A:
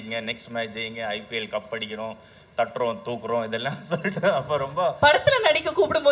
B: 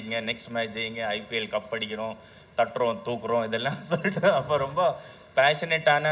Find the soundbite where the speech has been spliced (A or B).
A